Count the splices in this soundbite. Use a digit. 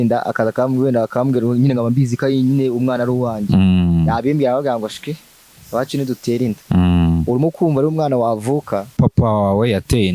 1